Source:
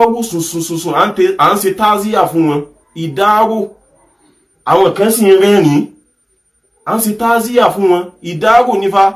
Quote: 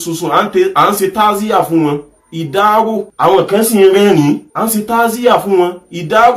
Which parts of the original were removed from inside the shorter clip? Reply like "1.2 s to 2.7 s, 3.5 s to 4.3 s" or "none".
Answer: 3.7 s to 4.5 s, 6.0 s to 6.8 s